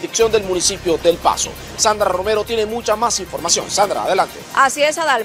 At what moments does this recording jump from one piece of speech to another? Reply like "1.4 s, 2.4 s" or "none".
none